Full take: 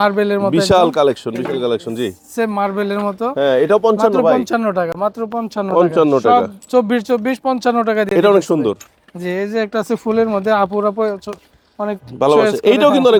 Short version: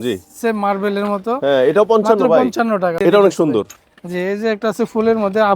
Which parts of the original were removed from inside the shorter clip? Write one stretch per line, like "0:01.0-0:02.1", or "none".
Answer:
0:04.9-0:08.1